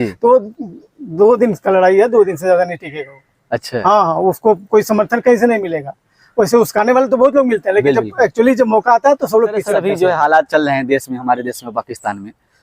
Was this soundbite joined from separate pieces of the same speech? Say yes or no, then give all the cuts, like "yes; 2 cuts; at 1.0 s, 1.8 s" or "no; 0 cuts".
yes; 1 cut; at 9.8 s